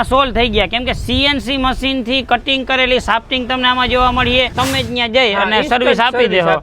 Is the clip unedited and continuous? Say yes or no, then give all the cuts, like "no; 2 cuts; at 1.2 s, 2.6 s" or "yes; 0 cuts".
no; 1 cut; at 4.5 s